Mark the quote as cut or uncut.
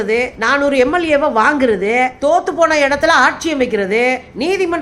uncut